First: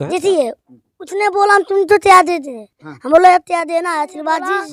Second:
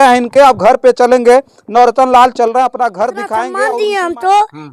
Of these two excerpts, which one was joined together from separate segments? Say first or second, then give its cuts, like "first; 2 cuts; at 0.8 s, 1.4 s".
second; 1 cut; at 3.5 s